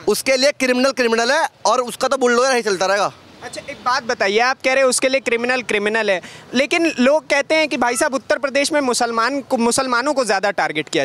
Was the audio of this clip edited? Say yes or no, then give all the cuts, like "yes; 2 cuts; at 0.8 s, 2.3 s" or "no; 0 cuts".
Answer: no; 0 cuts